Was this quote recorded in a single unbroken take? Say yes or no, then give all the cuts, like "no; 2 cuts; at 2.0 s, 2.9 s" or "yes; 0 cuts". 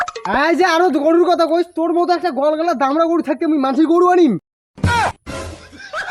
yes; 0 cuts